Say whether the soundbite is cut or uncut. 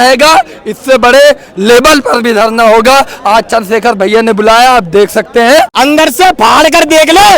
cut